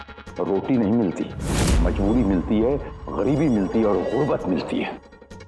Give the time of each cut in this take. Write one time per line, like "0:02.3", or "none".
0:01.8